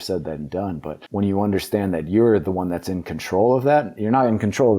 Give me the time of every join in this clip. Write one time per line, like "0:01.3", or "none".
0:01.0